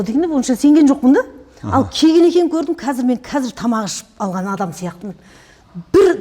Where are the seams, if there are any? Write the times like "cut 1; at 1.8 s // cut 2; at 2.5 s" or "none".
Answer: none